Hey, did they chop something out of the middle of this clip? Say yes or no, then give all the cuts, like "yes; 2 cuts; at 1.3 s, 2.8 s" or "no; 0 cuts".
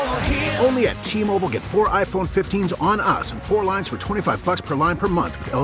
no; 0 cuts